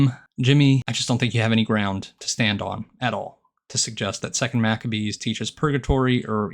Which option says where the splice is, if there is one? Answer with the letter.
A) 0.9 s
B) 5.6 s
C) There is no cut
A